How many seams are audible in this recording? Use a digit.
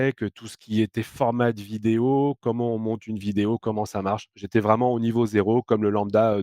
1